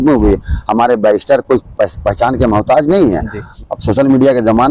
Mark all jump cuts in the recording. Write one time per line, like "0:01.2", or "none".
0:03.4